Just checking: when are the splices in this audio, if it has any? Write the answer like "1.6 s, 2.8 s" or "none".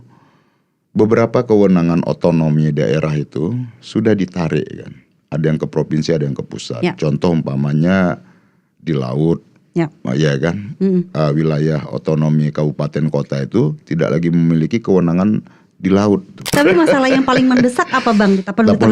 16.5 s